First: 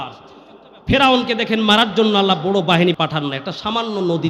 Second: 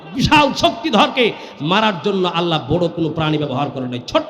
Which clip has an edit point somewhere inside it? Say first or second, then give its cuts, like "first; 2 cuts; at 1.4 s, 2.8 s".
first; 1 cut; at 2.9 s